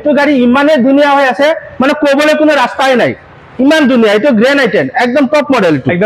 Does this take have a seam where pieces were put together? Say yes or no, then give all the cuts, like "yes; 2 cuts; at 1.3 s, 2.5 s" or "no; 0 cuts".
no; 0 cuts